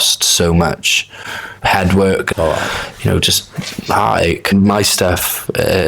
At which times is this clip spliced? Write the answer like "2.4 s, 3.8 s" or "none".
2.3 s, 4.5 s